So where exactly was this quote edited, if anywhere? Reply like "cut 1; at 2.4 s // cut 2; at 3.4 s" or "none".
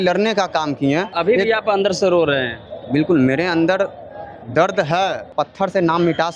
cut 1; at 1.1 s // cut 2; at 5.3 s